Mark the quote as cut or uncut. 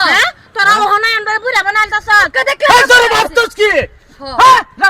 cut